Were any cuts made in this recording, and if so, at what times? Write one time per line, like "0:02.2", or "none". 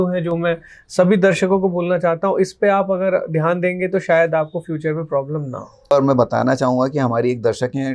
0:05.9